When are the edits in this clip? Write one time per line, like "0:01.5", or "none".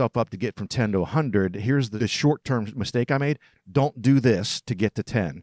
0:01.9